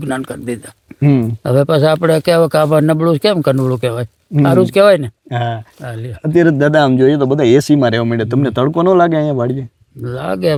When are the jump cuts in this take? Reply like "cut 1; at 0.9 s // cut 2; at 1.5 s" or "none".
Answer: none